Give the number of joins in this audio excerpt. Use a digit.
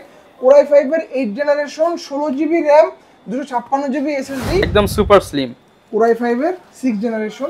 1